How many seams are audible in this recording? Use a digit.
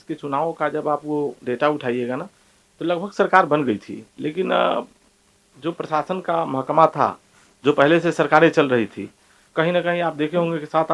0